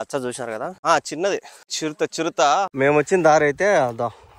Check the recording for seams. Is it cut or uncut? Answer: cut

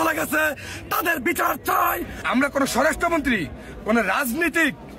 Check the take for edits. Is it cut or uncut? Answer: cut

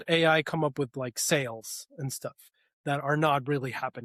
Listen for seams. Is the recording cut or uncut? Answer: uncut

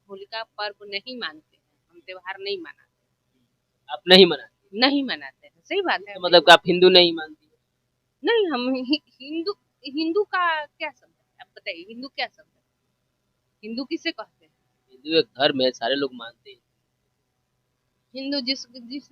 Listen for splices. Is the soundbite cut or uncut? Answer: uncut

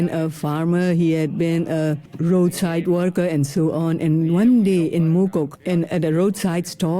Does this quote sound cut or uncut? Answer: cut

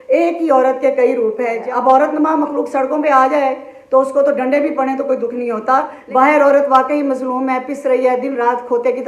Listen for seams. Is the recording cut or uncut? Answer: cut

